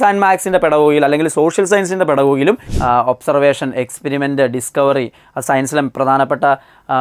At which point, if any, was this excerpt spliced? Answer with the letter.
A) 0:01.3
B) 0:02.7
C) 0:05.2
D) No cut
B